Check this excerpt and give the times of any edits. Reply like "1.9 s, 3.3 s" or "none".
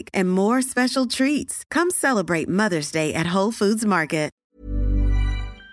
4.4 s